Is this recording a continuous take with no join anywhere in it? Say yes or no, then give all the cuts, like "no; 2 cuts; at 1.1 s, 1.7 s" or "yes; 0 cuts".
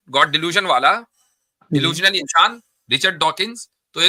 yes; 0 cuts